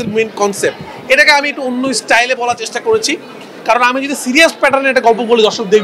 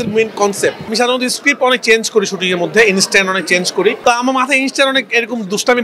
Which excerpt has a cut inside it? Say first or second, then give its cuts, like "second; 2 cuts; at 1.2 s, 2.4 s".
second; 2 cuts; at 0.9 s, 4.0 s